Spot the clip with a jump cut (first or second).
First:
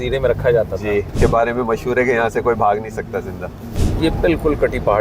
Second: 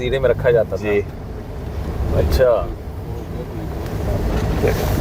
first